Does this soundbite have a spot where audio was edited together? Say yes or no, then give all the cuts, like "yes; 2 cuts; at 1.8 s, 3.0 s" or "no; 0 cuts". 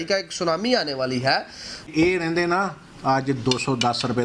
yes; 1 cut; at 1.9 s